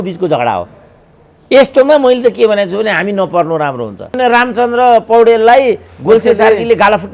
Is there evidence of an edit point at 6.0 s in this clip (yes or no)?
no